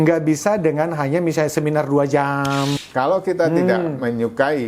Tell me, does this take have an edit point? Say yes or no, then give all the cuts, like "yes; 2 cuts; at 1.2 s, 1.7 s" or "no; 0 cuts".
yes; 1 cut; at 2.8 s